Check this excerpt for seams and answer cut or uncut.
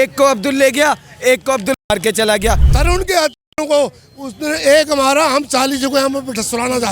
cut